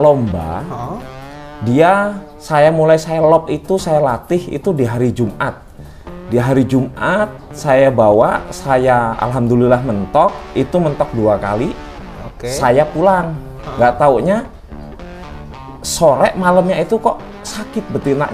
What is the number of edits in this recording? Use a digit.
0